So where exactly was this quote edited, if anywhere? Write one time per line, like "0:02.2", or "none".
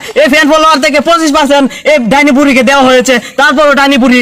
none